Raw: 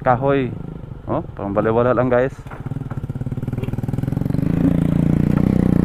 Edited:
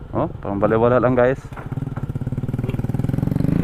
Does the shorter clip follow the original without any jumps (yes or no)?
yes